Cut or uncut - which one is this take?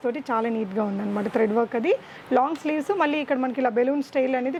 uncut